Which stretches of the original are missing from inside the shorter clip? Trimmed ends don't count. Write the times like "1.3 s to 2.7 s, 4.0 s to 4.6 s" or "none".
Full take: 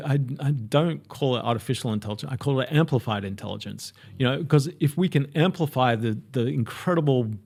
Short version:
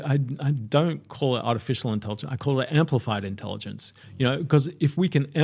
none